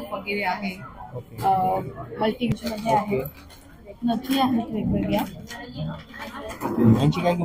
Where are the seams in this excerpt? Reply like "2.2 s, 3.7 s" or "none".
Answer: 2.5 s